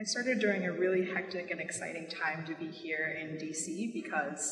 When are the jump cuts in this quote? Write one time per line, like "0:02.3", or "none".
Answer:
0:02.1

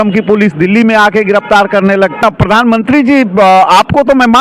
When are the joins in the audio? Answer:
0:02.2

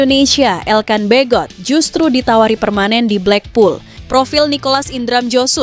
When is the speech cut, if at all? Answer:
0:03.9

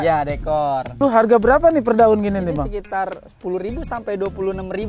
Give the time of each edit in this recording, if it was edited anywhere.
0:00.9

